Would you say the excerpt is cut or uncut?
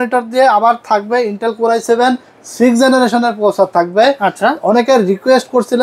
uncut